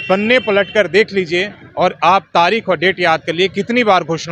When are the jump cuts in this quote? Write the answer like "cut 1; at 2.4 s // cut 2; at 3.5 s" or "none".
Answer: none